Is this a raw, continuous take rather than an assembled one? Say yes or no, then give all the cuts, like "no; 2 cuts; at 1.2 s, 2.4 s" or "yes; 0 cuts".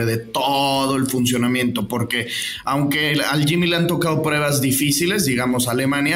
yes; 0 cuts